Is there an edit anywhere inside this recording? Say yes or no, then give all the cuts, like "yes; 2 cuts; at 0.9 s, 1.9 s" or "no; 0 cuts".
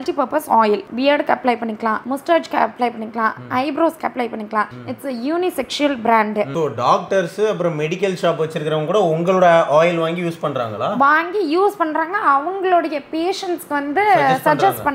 yes; 2 cuts; at 0.9 s, 6.5 s